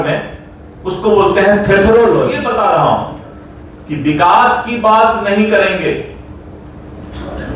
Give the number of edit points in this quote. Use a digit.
1